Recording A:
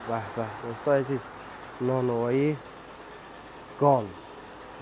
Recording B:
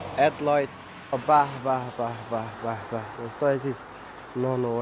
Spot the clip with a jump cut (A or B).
B